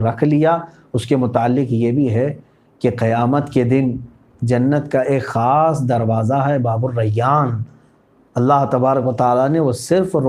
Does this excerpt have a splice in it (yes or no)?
no